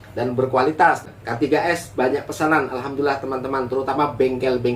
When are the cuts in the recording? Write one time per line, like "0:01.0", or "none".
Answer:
0:01.0